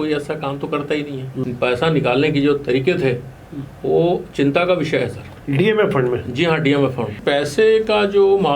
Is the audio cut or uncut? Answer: cut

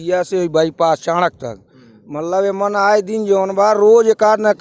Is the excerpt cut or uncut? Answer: uncut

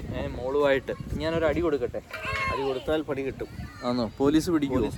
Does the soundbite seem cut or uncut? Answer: uncut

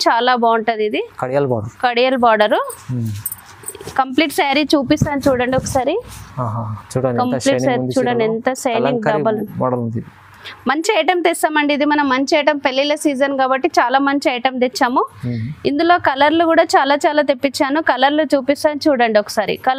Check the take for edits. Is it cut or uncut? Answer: uncut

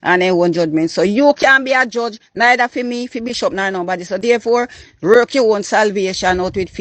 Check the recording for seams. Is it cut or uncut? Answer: uncut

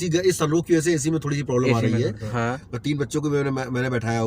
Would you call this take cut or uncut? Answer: cut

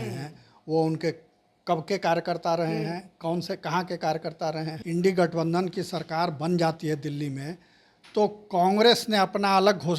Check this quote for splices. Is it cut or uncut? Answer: cut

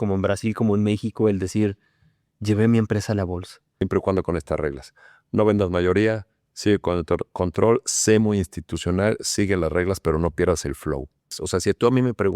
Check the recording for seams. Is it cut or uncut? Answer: cut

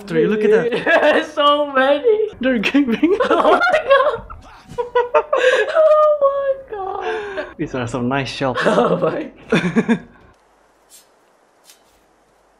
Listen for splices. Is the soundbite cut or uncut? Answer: cut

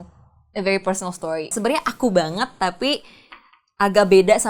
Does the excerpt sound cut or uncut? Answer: cut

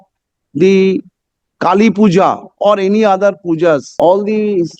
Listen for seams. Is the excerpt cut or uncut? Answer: cut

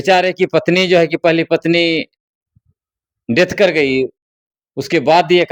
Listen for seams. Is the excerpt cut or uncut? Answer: uncut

